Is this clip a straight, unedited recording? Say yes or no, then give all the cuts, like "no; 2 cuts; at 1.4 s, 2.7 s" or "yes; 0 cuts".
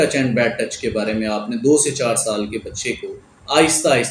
yes; 0 cuts